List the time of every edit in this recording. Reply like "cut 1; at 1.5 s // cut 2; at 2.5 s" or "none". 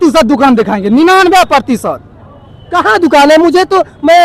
none